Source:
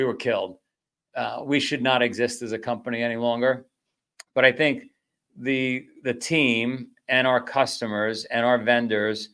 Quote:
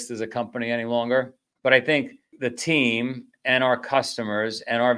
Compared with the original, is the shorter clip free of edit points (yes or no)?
no